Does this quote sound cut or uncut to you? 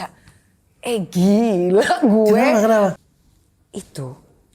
cut